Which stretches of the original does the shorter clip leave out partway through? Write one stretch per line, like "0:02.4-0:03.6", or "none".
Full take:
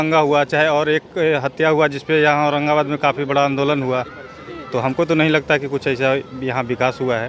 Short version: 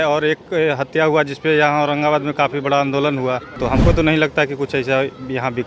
0:04.1-0:04.6